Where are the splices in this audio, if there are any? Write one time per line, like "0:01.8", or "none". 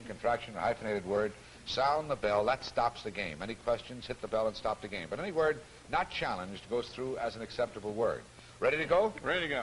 0:06.9